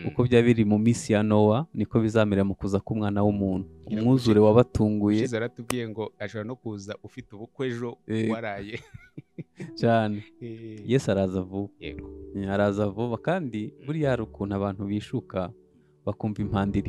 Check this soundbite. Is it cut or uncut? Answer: uncut